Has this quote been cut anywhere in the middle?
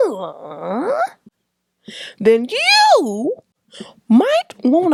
no; 0 cuts

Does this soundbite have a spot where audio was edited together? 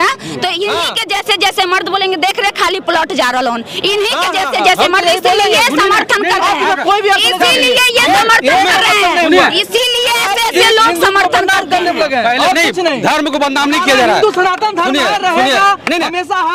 no; 0 cuts

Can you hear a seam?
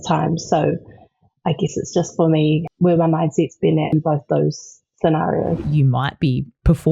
yes; 3 cuts; at 2.7 s, 3.9 s, 5.7 s

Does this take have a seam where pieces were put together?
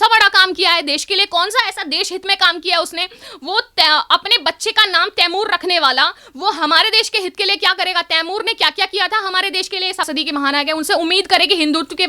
yes; 1 cut; at 10.1 s

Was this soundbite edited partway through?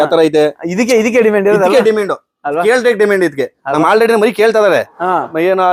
no; 0 cuts

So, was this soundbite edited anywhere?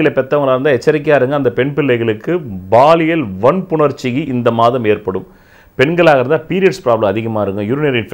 no; 0 cuts

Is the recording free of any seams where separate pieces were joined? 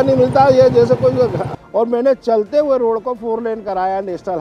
no; 1 cut; at 1.5 s

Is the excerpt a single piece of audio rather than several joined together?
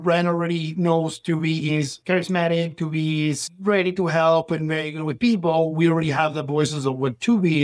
no; 1 cut; at 2.0 s

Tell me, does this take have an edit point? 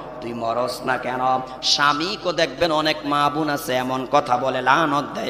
no; 0 cuts

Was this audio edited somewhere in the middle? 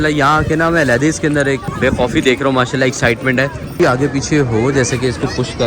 yes; 2 cuts; at 1.7 s, 3.6 s

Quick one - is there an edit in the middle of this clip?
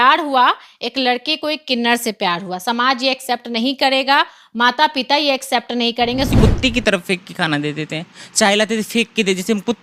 yes; 1 cut; at 6.3 s

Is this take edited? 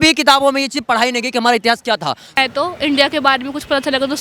yes; 1 cut; at 2.4 s

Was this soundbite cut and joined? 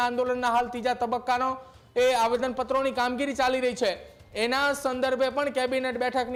no; 0 cuts

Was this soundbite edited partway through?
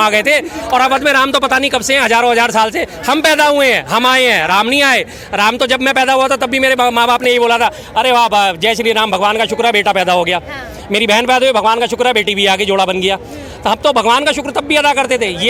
no; 0 cuts

